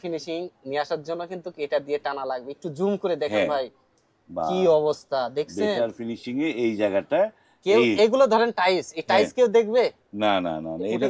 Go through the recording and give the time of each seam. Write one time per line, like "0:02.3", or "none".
none